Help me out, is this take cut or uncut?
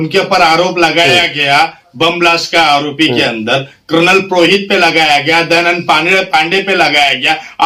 uncut